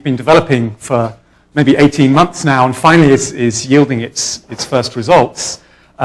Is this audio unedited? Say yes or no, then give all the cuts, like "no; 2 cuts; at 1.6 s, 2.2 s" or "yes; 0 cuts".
no; 1 cut; at 4.5 s